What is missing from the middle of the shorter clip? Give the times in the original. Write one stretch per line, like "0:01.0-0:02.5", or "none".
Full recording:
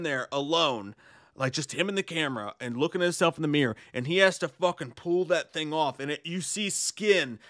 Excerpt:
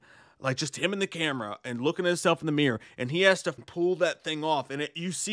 0:04.5-0:04.8